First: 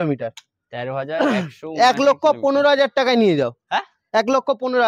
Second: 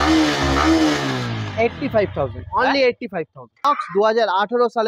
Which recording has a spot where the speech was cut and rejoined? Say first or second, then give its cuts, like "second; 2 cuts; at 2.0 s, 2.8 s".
second; 1 cut; at 3.6 s